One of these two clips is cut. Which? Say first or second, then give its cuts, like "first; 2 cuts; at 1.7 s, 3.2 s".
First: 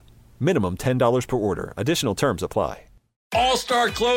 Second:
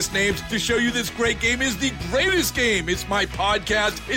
first; 1 cut; at 3.2 s